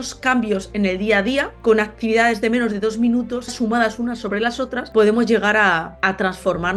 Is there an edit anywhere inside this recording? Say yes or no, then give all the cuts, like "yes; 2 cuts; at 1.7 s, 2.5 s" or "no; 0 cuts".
yes; 4 cuts; at 1.5 s, 3.5 s, 4.8 s, 5.9 s